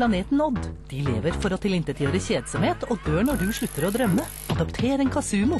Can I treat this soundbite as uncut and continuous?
no; 1 cut; at 4.4 s

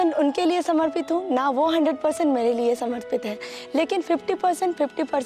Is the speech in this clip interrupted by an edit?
no; 0 cuts

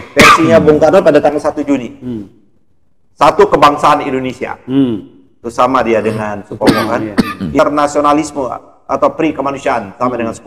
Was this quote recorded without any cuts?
no; 1 cut; at 7.6 s

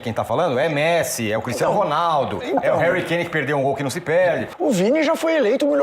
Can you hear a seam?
yes; 1 cut; at 4.5 s

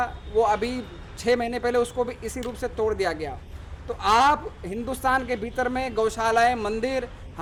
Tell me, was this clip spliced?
no; 0 cuts

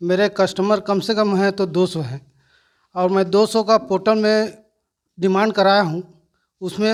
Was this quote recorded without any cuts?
yes; 0 cuts

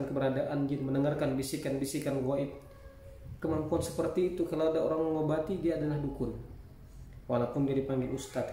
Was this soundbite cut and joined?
no; 0 cuts

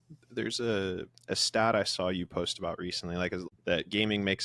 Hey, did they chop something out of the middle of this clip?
yes; 1 cut; at 3.4 s

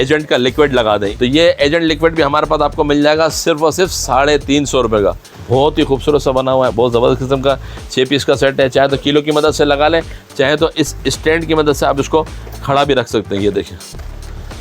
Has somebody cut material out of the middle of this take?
yes; 2 cuts; at 1.1 s, 5.2 s

